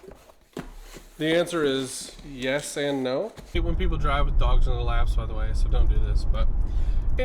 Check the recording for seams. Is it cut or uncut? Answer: cut